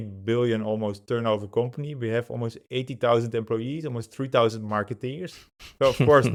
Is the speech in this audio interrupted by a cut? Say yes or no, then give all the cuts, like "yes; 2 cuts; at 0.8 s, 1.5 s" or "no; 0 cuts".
no; 0 cuts